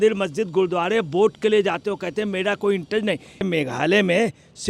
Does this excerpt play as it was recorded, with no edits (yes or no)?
no